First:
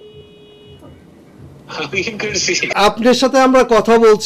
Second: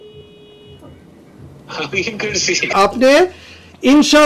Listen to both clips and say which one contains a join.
second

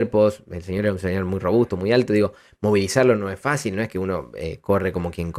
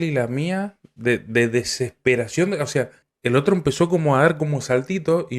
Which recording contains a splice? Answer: second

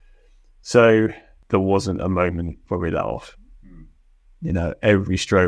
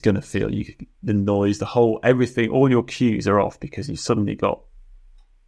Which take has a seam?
first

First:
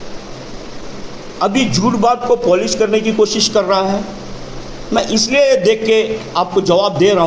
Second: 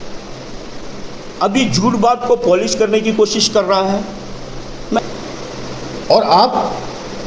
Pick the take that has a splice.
second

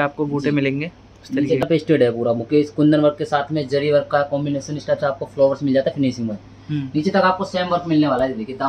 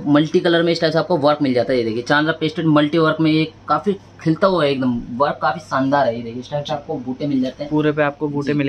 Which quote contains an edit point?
first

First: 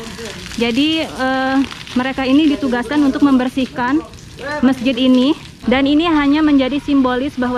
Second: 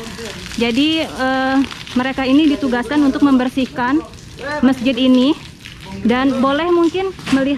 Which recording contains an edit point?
first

